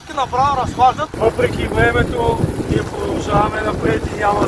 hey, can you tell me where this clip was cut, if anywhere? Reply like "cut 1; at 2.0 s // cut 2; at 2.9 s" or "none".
cut 1; at 1.1 s